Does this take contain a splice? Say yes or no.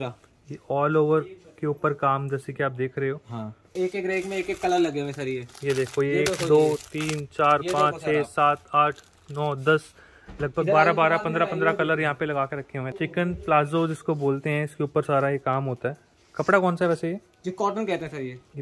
yes